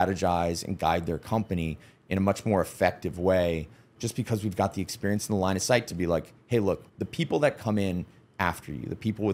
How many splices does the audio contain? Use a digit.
2